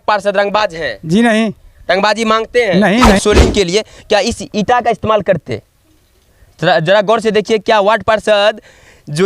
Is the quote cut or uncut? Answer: cut